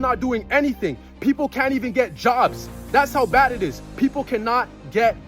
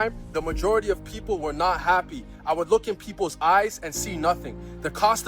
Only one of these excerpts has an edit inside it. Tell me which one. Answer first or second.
second